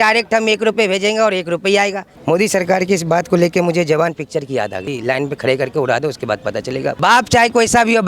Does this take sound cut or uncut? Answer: cut